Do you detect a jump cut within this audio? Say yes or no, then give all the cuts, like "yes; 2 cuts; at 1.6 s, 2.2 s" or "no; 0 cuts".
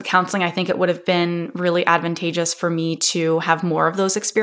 no; 0 cuts